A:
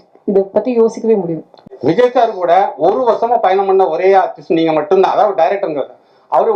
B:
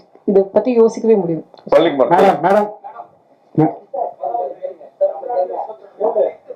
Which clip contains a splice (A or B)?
A